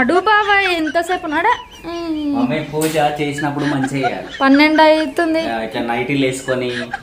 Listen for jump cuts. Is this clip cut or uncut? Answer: uncut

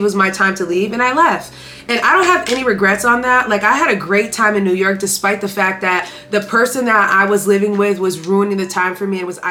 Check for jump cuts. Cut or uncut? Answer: uncut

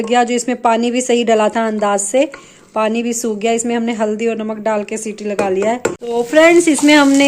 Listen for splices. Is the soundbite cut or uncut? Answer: cut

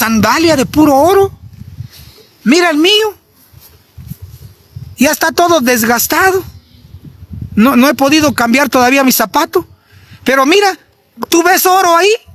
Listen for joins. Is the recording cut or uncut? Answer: uncut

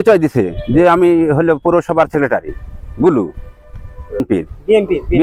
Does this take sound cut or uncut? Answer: cut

